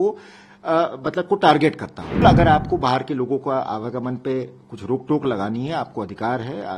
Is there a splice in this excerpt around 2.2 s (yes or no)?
yes